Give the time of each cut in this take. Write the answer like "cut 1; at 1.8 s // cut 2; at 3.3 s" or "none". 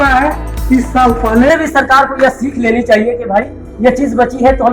cut 1; at 1.5 s